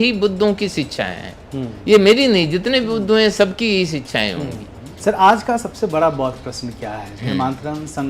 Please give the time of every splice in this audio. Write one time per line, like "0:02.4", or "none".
0:05.0